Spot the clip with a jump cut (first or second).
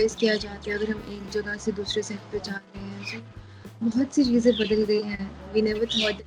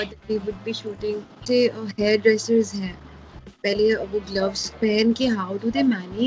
second